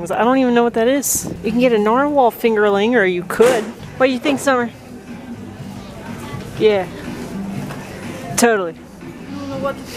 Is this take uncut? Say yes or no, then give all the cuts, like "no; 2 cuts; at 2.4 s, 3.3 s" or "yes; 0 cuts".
yes; 0 cuts